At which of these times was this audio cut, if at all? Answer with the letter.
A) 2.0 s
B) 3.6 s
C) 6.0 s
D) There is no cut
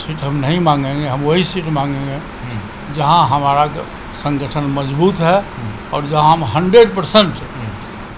D